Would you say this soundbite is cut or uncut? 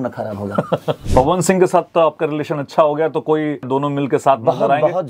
cut